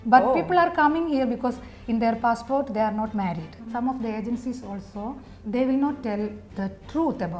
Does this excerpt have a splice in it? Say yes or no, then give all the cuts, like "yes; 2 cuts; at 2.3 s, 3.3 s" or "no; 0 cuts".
yes; 1 cut; at 3.6 s